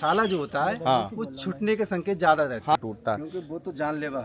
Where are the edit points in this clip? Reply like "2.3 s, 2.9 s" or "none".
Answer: 2.8 s